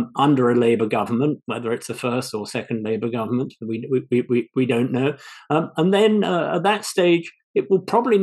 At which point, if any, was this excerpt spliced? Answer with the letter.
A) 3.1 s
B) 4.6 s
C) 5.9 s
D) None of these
D